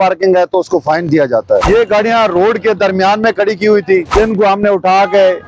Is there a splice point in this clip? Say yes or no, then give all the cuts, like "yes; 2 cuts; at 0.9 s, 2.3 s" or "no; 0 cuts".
yes; 2 cuts; at 1.7 s, 4.1 s